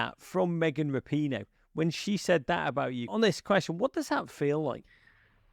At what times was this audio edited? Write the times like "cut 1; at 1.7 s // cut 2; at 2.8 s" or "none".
cut 1; at 3.1 s